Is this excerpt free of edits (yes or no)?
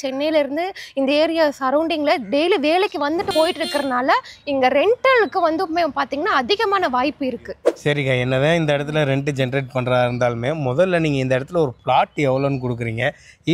no